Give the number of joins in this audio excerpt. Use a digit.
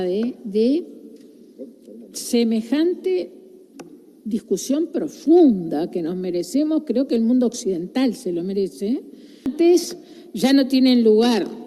1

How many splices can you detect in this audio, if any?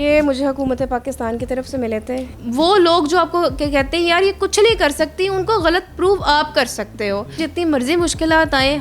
2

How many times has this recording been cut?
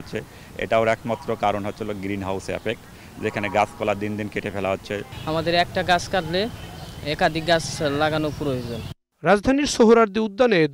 0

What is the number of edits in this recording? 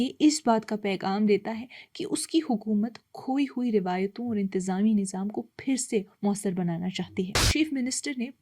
1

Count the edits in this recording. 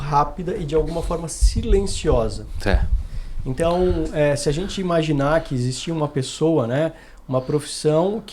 0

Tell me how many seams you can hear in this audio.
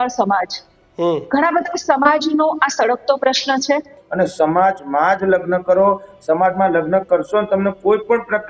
1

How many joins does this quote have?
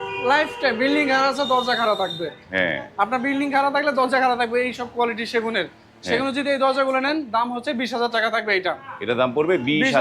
0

